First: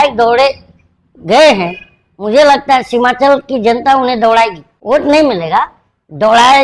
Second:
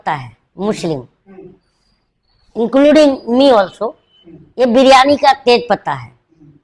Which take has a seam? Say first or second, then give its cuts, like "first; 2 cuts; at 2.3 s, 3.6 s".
first; 1 cut; at 4.7 s